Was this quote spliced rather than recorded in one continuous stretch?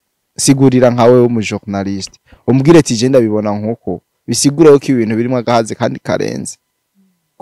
no; 0 cuts

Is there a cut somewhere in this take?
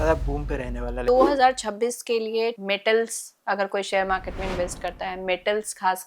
yes; 2 cuts; at 1.0 s, 2.6 s

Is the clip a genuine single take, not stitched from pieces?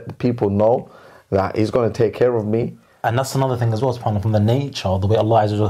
no; 1 cut; at 2.8 s

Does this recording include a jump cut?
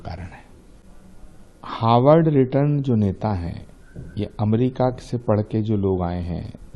yes; 1 cut; at 0.9 s

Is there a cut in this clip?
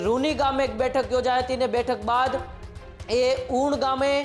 no; 0 cuts

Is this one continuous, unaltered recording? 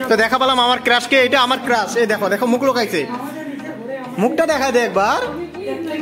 yes; 0 cuts

